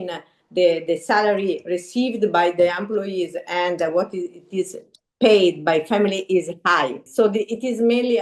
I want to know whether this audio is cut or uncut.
cut